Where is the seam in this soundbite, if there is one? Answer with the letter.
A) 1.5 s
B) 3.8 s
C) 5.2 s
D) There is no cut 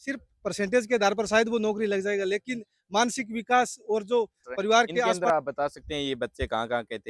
C